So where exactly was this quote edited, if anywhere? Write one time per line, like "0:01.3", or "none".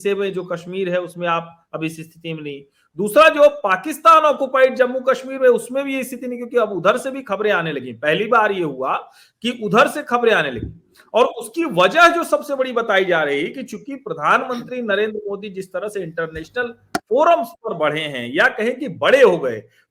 none